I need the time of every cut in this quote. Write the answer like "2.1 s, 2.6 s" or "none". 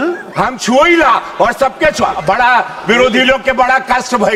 none